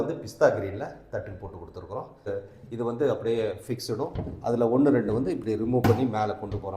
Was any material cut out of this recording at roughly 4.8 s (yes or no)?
no